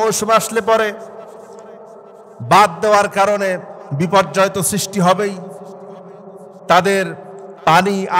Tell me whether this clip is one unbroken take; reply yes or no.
yes